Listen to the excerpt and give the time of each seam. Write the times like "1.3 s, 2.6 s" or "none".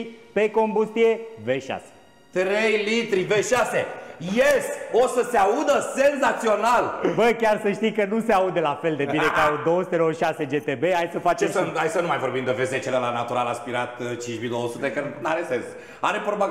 none

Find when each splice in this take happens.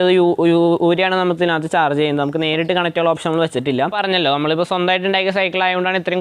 4.0 s

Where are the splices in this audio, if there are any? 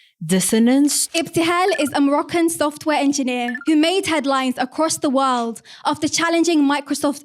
1.0 s, 3.5 s

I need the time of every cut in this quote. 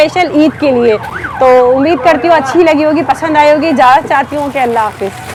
none

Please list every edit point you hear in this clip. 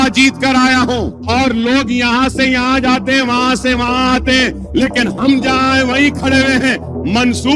1.1 s

